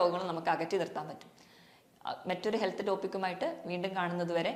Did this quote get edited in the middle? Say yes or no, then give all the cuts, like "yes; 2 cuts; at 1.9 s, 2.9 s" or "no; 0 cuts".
no; 0 cuts